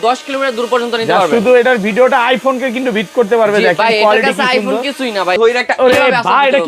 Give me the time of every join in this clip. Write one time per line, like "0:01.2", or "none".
0:05.4